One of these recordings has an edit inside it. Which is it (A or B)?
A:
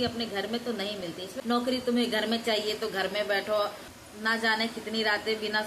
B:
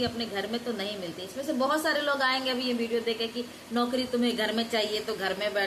A